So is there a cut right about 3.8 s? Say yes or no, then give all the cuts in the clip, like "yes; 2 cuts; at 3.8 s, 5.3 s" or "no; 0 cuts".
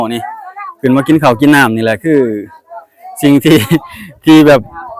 no; 0 cuts